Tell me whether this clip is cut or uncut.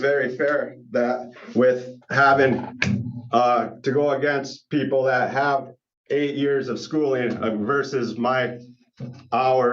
uncut